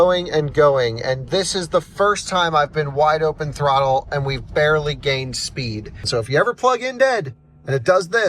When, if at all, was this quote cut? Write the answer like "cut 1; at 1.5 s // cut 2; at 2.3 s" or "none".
cut 1; at 6.0 s